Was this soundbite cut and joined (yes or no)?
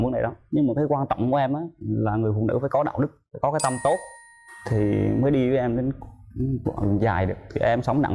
no